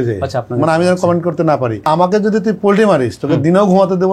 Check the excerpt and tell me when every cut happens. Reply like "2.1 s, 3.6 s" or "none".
1.9 s